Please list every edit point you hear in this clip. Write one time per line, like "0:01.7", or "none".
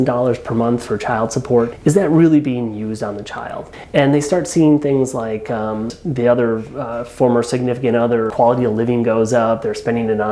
0:01.7
0:03.7
0:05.9
0:08.3